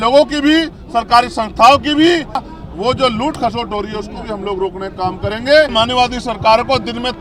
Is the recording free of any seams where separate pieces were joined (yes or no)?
no